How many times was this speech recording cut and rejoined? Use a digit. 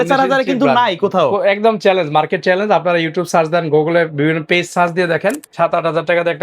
1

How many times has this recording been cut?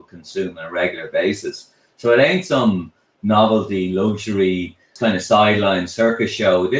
1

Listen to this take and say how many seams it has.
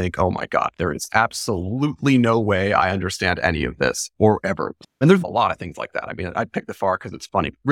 1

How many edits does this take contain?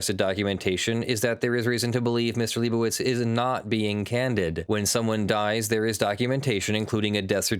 1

